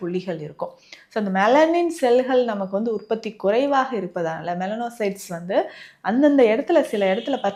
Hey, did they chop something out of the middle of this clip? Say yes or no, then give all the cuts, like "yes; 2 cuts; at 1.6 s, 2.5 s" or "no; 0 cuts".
no; 0 cuts